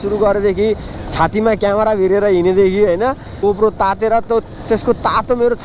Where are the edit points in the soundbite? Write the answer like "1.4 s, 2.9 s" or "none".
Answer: 3.4 s